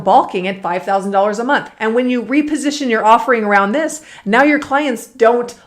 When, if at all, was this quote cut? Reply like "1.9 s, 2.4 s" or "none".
1.7 s